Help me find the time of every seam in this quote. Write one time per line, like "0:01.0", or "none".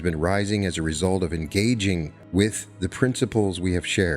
0:02.2